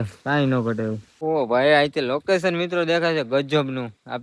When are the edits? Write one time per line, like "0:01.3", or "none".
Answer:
0:01.1